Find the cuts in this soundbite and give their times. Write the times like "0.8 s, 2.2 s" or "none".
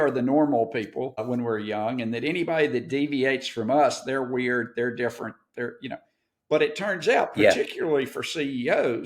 1.2 s

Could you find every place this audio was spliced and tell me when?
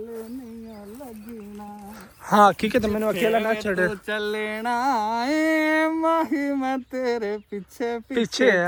none

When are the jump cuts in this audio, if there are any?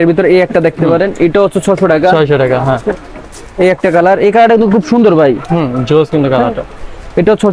none

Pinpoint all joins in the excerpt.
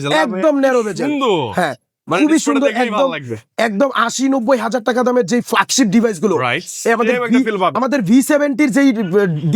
none

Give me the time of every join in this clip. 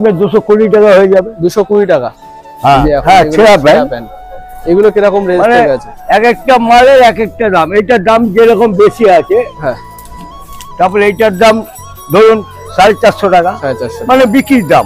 2.8 s

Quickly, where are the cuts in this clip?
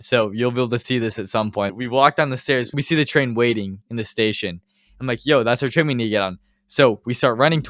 1.7 s, 2.8 s, 3.8 s

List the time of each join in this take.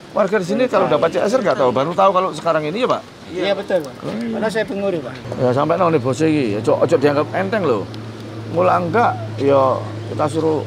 5.2 s

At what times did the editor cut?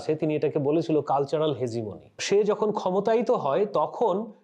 2.2 s

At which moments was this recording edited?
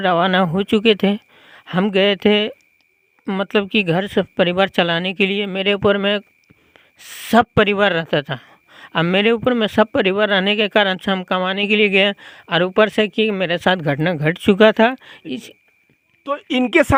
none

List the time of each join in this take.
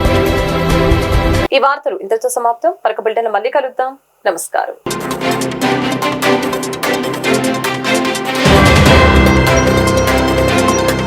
none

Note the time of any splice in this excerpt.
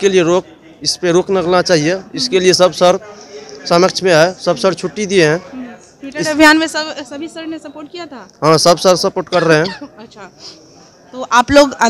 none

